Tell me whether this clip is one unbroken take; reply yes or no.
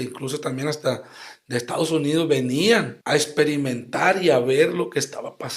no